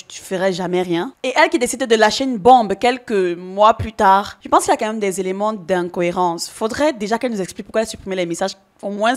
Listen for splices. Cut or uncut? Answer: uncut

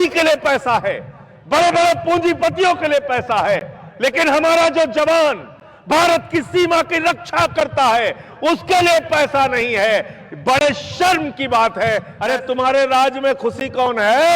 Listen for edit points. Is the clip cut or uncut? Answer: cut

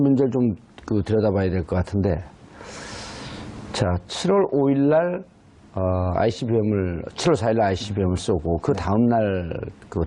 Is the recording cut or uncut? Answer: cut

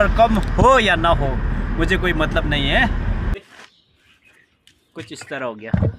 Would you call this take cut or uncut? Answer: cut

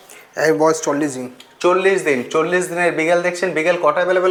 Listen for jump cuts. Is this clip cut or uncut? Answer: uncut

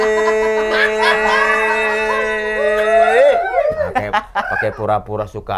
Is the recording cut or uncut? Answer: uncut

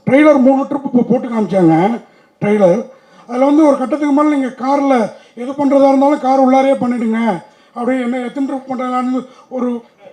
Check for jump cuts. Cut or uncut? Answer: uncut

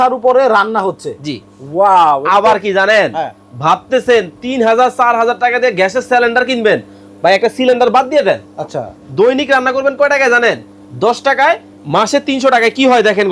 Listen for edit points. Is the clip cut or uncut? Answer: uncut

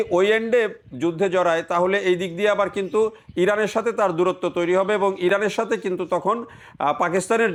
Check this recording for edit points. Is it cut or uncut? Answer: uncut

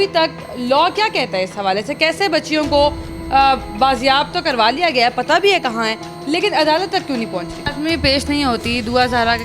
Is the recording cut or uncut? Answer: cut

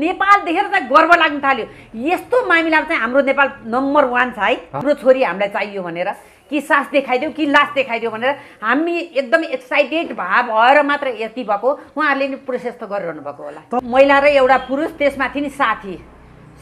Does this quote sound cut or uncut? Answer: cut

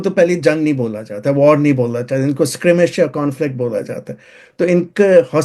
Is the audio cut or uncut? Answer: uncut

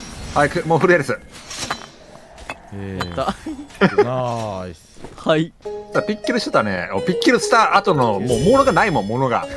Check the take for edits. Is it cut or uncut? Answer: uncut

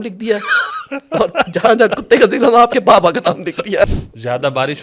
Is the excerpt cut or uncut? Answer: cut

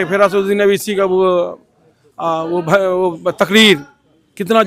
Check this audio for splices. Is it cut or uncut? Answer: uncut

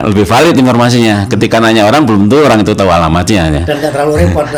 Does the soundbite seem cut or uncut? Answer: uncut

